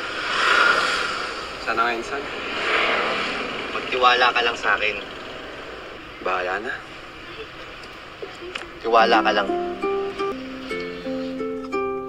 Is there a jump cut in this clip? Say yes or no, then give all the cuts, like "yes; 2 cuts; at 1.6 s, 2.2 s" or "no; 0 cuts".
yes; 1 cut; at 10.3 s